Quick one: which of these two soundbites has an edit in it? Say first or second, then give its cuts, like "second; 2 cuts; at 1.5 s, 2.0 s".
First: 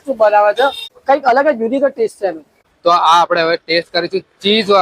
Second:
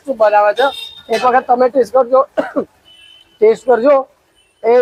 first; 2 cuts; at 0.9 s, 2.7 s